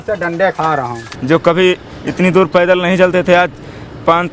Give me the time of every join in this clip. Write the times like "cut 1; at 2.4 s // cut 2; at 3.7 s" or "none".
cut 1; at 1.0 s